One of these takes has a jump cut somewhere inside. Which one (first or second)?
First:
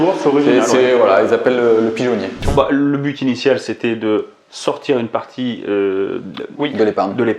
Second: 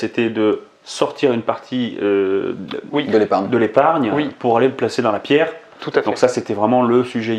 first